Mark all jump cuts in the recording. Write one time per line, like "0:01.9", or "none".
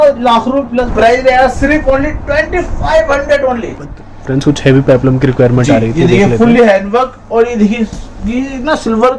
0:00.8
0:03.8